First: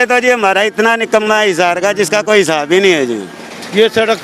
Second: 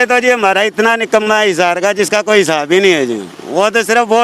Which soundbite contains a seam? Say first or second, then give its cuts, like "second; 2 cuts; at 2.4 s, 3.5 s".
first; 1 cut; at 3.3 s